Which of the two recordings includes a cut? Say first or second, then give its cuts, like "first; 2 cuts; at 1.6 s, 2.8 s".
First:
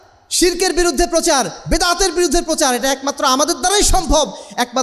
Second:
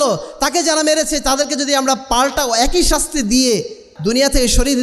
second; 1 cut; at 3.9 s